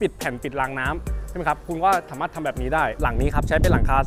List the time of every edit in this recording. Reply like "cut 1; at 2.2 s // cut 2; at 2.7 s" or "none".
cut 1; at 3.0 s